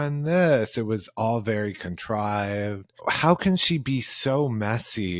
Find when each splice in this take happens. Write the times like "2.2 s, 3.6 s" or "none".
2.9 s